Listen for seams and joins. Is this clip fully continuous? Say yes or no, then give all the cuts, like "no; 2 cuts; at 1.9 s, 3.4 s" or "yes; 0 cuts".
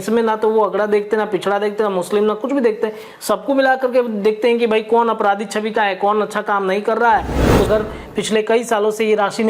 no; 1 cut; at 7.7 s